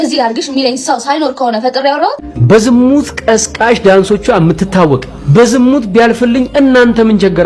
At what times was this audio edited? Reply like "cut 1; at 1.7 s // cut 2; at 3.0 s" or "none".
cut 1; at 2.3 s